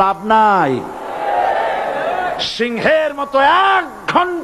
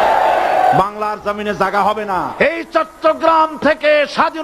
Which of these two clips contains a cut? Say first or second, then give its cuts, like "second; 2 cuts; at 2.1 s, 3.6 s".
second; 1 cut; at 2.4 s